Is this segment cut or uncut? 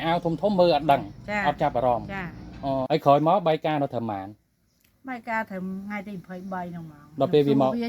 cut